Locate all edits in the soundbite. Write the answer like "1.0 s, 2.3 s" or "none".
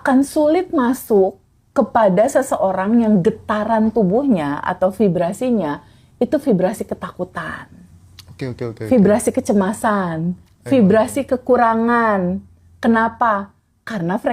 none